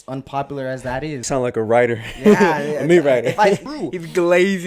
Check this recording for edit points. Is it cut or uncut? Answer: cut